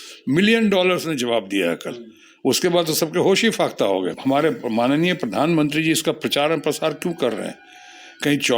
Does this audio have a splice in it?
yes; 1 cut; at 4.2 s

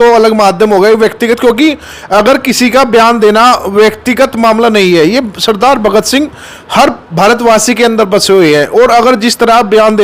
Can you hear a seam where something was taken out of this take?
no; 0 cuts

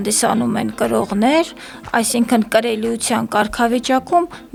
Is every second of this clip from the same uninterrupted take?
yes; 0 cuts

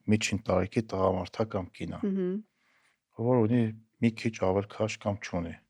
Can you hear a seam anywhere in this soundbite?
no; 0 cuts

